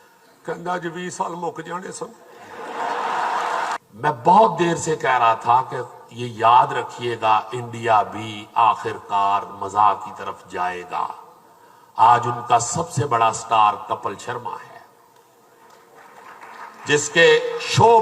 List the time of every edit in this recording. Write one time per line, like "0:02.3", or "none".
0:03.8